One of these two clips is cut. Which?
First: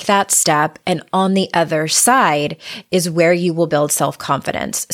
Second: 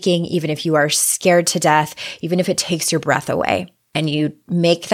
second; 1 cut; at 3.8 s

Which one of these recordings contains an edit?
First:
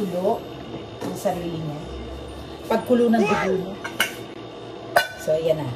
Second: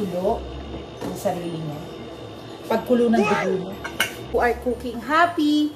second; 1 cut; at 4.3 s

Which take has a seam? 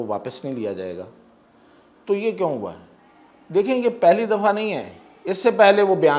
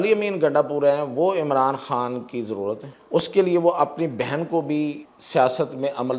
second; 2 cuts; at 2.9 s, 5.1 s

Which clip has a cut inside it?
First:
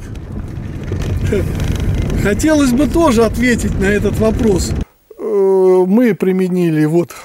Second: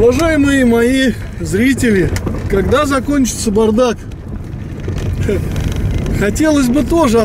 first; 1 cut; at 4.8 s

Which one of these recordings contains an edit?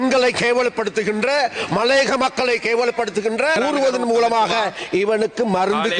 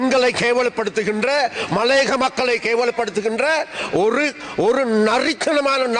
first; 1 cut; at 3.5 s

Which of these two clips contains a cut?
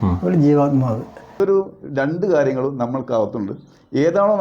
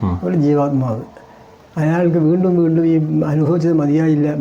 first; 1 cut; at 1.4 s

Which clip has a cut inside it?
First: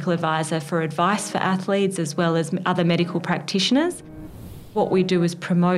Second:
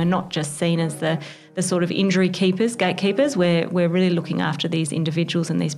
first; 1 cut; at 4.5 s

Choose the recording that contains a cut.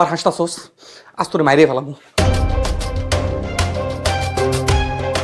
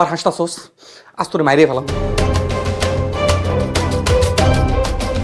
second; 1 cut; at 2.0 s

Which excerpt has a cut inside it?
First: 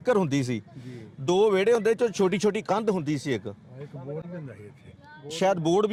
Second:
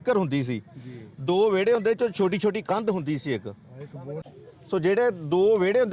second; 1 cut; at 4.3 s

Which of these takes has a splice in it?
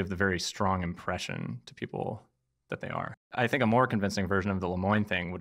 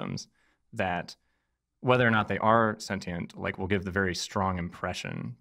first; 1 cut; at 3.3 s

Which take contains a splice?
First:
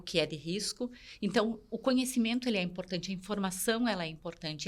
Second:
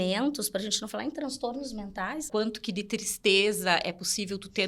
second; 1 cut; at 2.2 s

